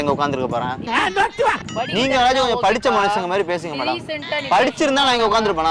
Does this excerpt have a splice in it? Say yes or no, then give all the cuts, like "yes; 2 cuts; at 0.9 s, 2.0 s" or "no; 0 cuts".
no; 0 cuts